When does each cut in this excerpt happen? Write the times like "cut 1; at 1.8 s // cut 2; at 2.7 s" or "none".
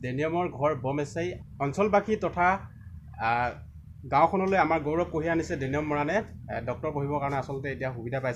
cut 1; at 1.4 s